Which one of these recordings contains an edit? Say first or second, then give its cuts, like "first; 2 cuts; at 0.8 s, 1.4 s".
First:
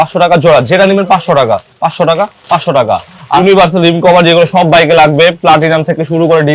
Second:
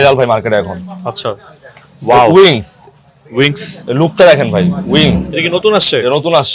first; 1 cut; at 3.4 s